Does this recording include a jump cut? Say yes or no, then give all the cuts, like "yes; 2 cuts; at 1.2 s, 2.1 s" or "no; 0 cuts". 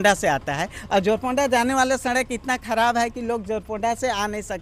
no; 0 cuts